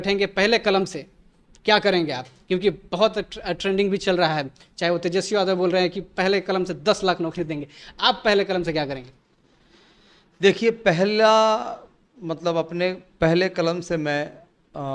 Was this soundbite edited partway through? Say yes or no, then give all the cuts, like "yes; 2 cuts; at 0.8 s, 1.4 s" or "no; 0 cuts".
no; 0 cuts